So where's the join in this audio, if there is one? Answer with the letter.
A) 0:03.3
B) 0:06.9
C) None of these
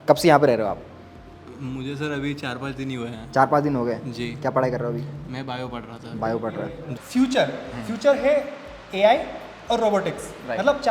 B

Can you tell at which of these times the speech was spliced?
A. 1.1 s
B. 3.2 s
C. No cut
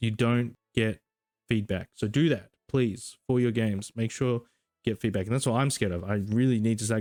C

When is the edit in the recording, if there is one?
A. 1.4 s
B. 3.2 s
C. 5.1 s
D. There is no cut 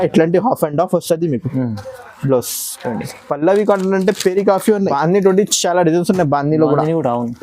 C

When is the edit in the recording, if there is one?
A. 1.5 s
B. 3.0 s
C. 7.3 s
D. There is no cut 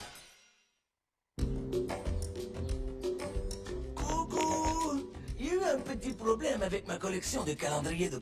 C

